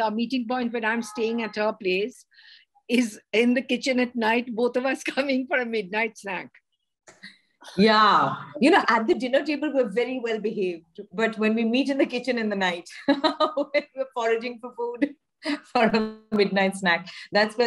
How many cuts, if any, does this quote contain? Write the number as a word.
zero